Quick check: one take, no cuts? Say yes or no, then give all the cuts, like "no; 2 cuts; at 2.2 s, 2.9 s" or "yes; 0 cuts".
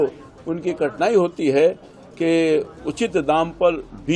yes; 0 cuts